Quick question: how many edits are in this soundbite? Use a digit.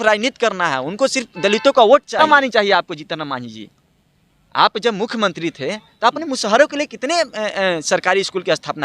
1